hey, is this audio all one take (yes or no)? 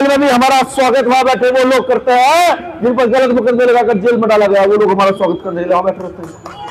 yes